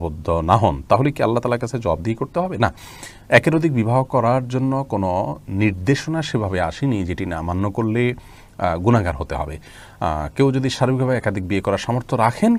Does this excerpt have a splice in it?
no; 0 cuts

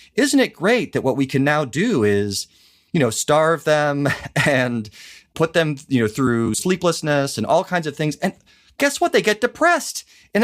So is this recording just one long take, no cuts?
no; 1 cut; at 5.2 s

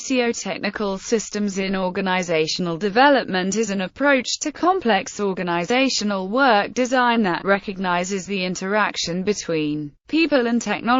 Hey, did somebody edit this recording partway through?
yes; 1 cut; at 1.0 s

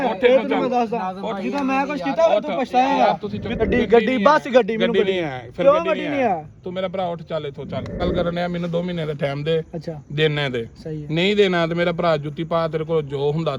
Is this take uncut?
no; 2 cuts; at 3.6 s, 8.0 s

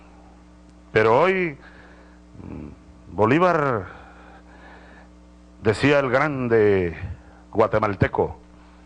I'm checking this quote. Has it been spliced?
no; 0 cuts

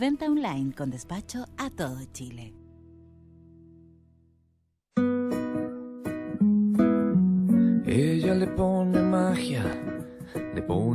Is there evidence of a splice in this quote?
yes; 1 cut; at 4.7 s

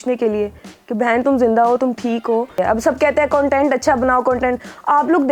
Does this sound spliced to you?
yes; 1 cut; at 2.6 s

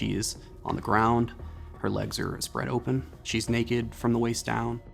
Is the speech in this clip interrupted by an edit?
no; 0 cuts

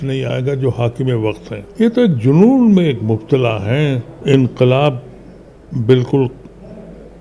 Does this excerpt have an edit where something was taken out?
yes; 2 cuts; at 1.6 s, 4.1 s

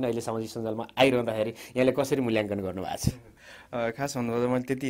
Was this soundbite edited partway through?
no; 0 cuts

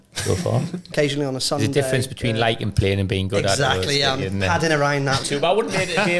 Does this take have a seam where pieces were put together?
yes; 2 cuts; at 0.9 s, 5.2 s

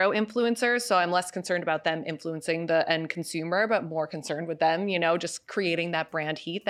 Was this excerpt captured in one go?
yes; 0 cuts

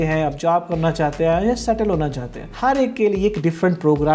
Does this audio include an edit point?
yes; 1 cut; at 2.5 s

